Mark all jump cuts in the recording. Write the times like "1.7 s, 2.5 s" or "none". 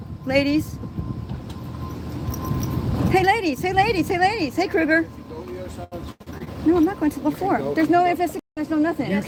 none